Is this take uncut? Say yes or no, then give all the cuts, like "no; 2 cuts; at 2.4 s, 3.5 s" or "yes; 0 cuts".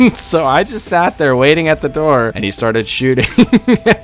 no; 1 cut; at 2.3 s